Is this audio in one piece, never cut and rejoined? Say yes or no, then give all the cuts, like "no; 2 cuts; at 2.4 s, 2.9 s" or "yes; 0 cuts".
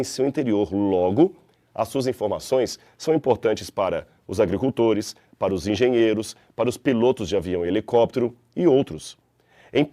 no; 1 cut; at 7.5 s